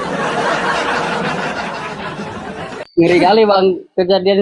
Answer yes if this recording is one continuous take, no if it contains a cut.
yes